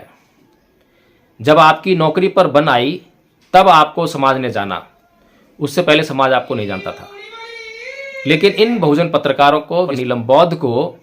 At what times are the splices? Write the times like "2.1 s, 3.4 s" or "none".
10.0 s

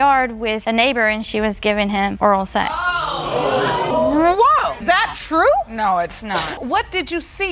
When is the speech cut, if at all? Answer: 3.9 s, 4.7 s, 6.5 s

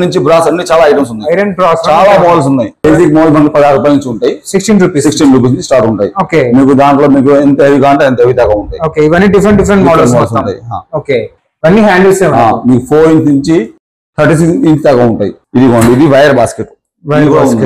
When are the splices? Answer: 2.8 s, 15.3 s

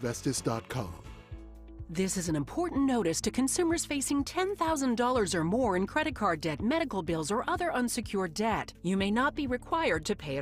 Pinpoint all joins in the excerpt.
1.3 s

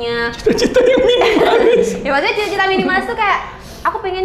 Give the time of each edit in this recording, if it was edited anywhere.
none

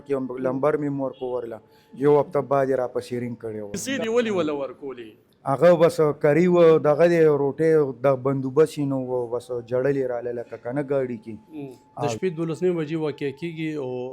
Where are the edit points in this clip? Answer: 3.7 s, 12.1 s

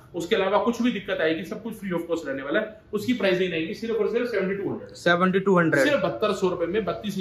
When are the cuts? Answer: none

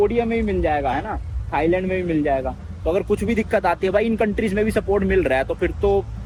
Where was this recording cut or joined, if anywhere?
none

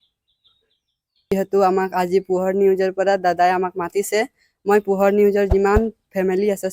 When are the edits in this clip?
1.3 s

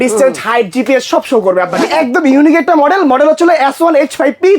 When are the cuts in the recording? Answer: 1.9 s

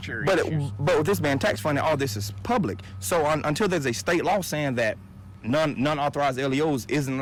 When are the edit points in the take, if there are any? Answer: none

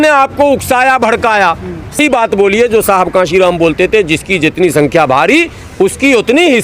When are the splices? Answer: 2.0 s

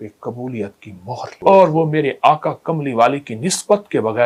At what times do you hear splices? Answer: none

